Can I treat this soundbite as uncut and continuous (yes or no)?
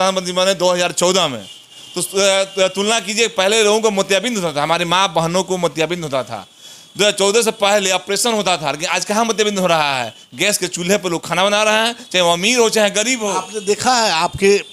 yes